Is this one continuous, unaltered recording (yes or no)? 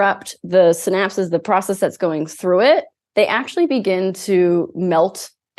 yes